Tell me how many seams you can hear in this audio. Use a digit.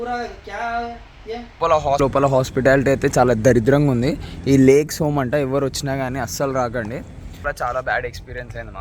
1